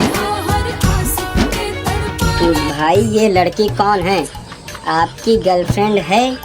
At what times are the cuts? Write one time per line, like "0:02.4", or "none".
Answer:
0:02.4

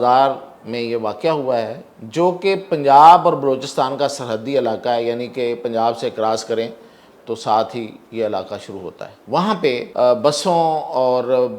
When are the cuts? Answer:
0:09.1
0:09.9

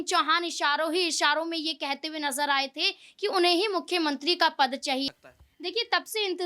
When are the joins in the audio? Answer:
0:05.1

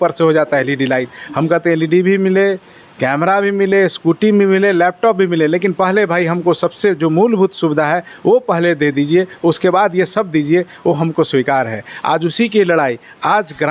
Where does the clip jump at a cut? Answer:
none

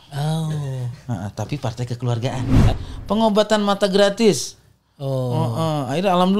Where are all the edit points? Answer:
0:02.7

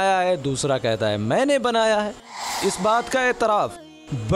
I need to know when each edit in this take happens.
0:02.6

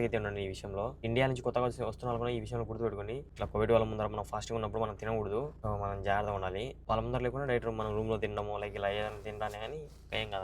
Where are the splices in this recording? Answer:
0:01.0
0:03.3
0:05.5
0:06.8

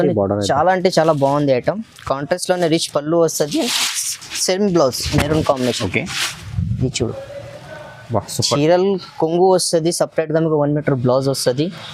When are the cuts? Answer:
none

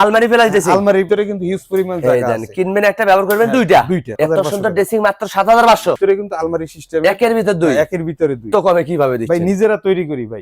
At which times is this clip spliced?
0:04.1
0:06.0
0:08.5

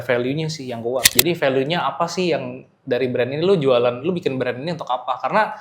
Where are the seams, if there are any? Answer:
0:01.1

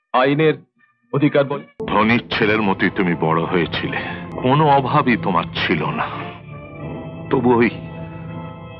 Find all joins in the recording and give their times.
0:01.7
0:04.2

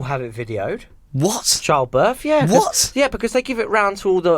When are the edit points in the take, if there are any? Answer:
0:01.0

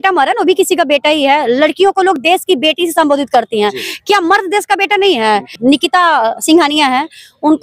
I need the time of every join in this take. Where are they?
0:05.6

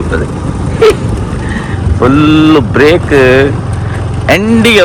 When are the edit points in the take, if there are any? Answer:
none

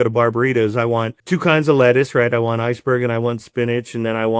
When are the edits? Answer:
0:01.2

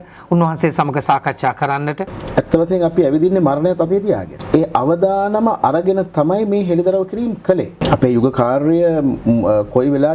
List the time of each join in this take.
0:02.1
0:04.3
0:07.8

